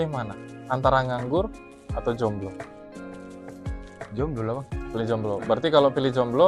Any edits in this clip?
no; 0 cuts

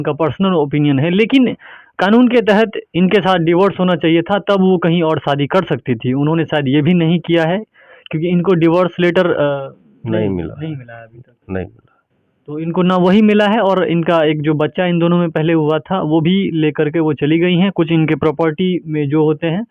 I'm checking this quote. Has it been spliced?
no; 0 cuts

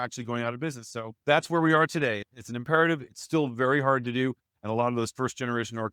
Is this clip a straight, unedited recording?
no; 1 cut; at 1.1 s

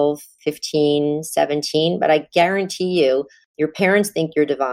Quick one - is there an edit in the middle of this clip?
no; 0 cuts

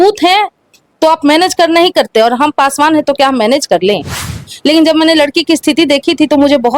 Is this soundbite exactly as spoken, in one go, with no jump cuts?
no; 1 cut; at 4.5 s

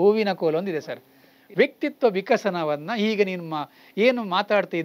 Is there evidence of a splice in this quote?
yes; 1 cut; at 1.4 s

